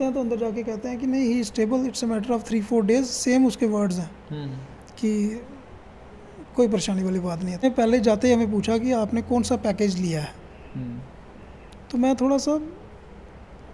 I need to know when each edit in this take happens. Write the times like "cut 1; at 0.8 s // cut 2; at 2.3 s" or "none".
cut 1; at 7.6 s